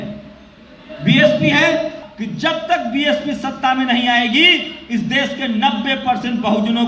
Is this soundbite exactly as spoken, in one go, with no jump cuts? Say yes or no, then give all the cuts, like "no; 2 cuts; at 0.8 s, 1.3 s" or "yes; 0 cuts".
no; 1 cut; at 2.1 s